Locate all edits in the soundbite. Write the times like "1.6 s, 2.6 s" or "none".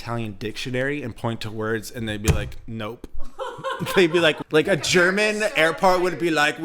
4.4 s